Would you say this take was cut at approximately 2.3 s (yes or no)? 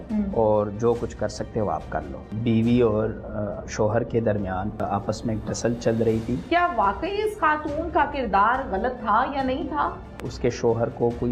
yes